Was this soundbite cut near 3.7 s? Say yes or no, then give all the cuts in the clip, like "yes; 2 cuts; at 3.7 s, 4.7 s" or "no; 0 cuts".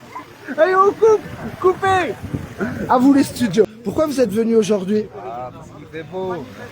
yes; 1 cut; at 3.7 s